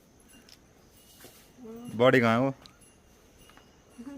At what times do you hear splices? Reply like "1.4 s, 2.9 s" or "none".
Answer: none